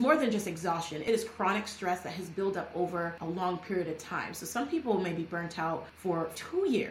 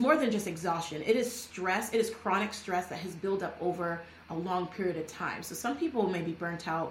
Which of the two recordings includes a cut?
first; 3 cuts; at 1.0 s, 3.2 s, 6.1 s

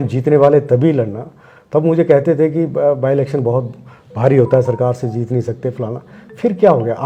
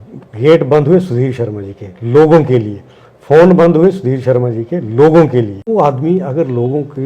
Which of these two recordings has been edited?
second; 1 cut; at 5.7 s

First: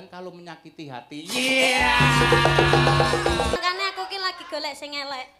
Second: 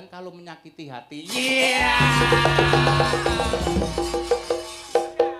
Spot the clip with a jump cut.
first; 1 cut; at 3.6 s

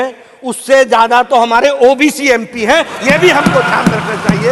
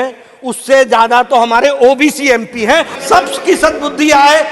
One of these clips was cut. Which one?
second; 1 cut; at 2.9 s

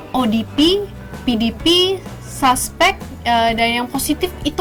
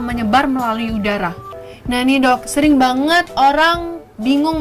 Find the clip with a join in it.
second; 1 cut; at 1.4 s

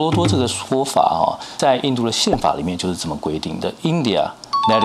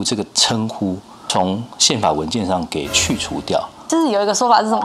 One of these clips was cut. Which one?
second; 1 cut; at 3.8 s

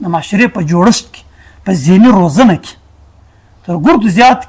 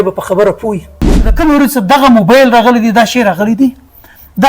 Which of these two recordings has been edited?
second; 1 cut; at 1.3 s

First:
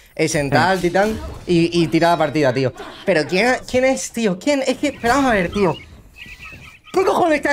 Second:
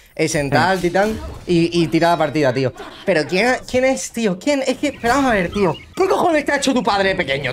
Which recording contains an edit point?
second; 1 cut; at 5.8 s

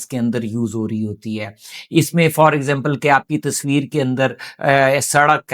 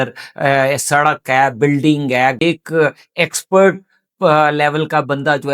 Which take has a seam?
second; 1 cut; at 2.4 s

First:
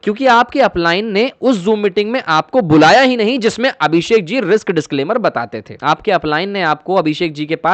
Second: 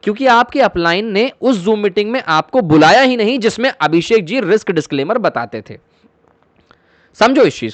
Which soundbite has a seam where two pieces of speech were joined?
first; 1 cut; at 5.6 s

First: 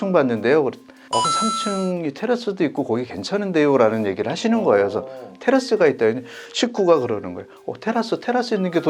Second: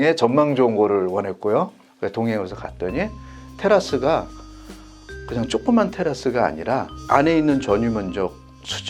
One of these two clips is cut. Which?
second; 1 cut; at 1.8 s

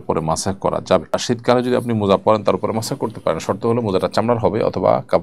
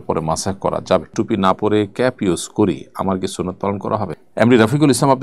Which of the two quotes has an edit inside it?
second; 2 cuts; at 1.1 s, 4.1 s

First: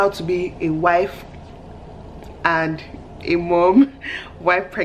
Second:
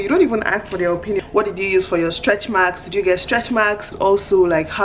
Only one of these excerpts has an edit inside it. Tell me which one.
second; 2 cuts; at 1.2 s, 3.9 s

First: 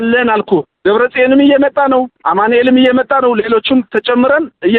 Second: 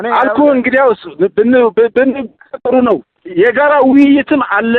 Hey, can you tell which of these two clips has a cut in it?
second; 1 cut; at 3.2 s

